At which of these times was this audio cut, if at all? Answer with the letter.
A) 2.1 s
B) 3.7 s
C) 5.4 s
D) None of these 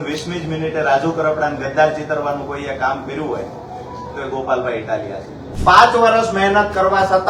C